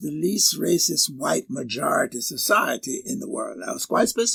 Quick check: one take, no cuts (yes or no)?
yes